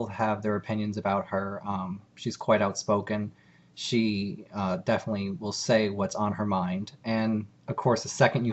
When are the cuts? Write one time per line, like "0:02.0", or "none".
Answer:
0:04.3